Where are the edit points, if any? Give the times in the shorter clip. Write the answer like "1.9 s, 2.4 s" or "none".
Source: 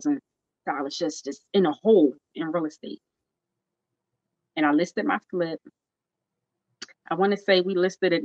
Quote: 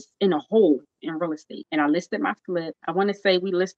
1.5 s, 2.8 s